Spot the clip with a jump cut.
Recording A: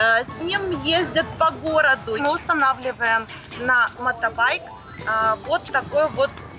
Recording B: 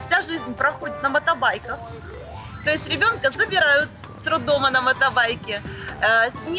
A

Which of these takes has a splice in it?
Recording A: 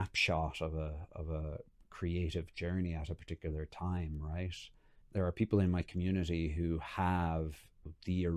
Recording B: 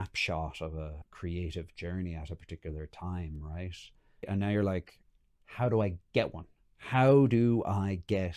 B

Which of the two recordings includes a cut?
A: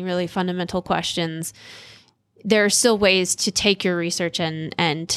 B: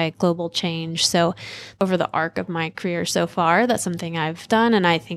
B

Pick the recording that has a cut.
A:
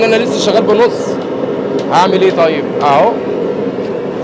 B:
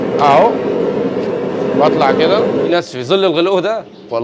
B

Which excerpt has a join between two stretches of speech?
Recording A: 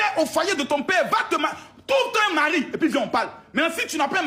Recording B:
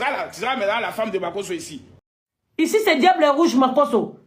B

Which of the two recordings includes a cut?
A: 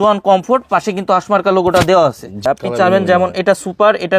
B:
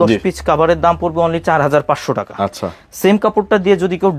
A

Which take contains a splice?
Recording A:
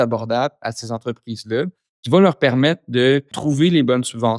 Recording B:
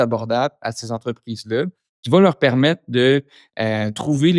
A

